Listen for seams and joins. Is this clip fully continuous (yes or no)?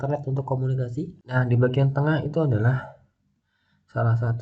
no